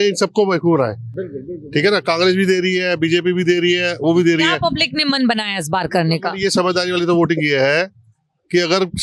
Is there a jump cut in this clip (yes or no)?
no